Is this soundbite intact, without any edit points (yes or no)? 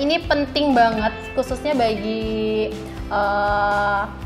yes